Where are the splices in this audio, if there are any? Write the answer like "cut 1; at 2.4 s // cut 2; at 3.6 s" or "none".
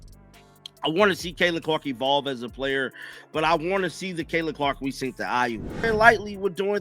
cut 1; at 5.7 s